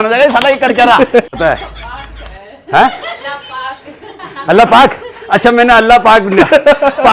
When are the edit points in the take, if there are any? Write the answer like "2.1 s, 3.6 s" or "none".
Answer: 1.3 s